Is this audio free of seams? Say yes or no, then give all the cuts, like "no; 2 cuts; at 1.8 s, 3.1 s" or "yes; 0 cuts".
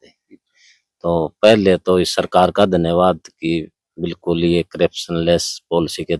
yes; 0 cuts